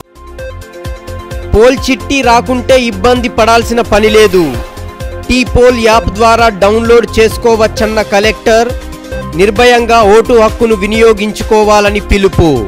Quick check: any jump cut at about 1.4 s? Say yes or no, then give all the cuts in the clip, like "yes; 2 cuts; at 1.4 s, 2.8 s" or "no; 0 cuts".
yes; 1 cut; at 1.4 s